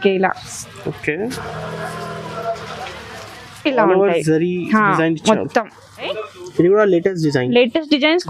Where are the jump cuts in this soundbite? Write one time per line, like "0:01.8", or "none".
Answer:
0:06.2

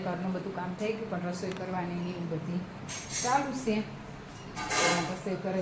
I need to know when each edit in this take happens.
none

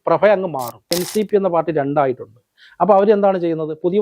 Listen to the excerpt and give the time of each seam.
0:01.0

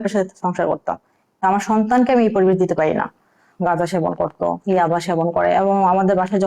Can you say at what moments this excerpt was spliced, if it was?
0:03.4

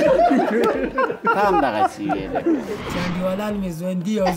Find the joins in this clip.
0:02.8

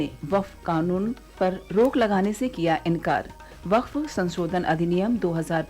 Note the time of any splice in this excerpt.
0:01.2

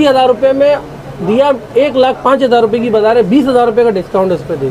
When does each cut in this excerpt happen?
none

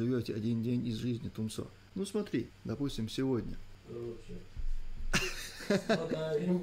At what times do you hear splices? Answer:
0:01.8
0:02.6
0:03.7

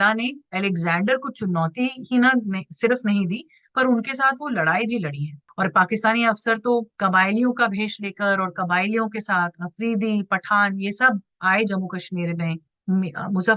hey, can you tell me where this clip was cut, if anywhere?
0:05.4
0:06.9

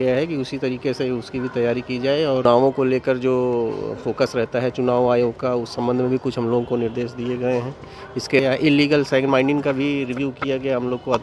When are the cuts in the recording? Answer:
0:02.4
0:08.4

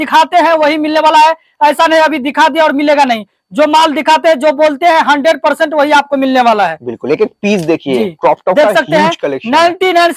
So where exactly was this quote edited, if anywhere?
none

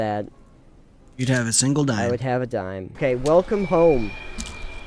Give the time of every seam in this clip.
0:02.9

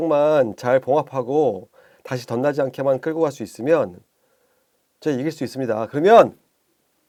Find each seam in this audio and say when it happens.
none

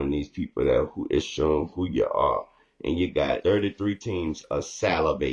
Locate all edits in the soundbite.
0:03.4

